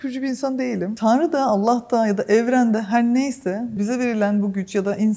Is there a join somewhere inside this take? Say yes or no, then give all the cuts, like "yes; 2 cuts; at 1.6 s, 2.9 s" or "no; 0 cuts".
yes; 2 cuts; at 0.9 s, 3.8 s